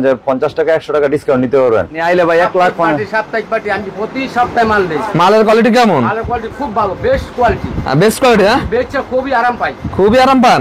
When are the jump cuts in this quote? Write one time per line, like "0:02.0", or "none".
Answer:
0:02.0